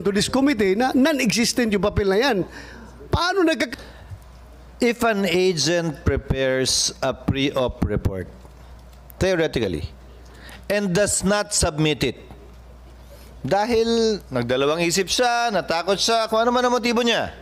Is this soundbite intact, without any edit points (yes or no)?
no